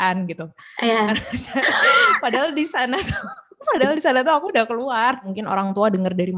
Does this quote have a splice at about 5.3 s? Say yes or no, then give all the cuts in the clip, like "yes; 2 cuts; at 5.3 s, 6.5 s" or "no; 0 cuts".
yes; 1 cut; at 5.3 s